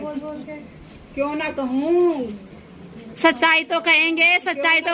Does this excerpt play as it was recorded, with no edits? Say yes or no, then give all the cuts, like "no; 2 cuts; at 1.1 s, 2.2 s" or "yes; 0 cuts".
yes; 0 cuts